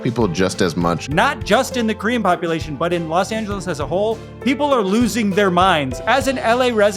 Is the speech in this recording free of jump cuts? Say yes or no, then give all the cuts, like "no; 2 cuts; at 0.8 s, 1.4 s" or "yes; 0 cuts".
no; 2 cuts; at 1.0 s, 5.9 s